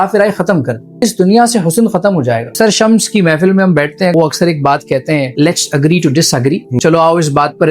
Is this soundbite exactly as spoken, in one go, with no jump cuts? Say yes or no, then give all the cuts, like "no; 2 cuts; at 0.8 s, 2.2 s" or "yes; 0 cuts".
no; 5 cuts; at 1.0 s, 2.5 s, 4.1 s, 5.3 s, 6.8 s